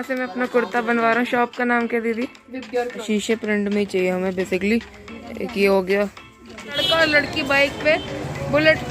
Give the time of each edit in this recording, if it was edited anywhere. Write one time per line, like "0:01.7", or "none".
0:03.0
0:06.8